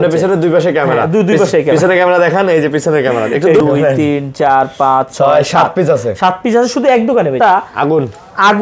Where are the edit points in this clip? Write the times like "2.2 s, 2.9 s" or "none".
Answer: 3.6 s, 7.4 s